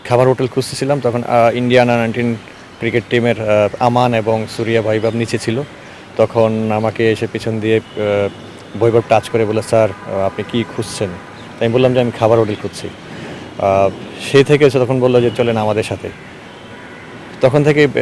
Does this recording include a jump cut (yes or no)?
no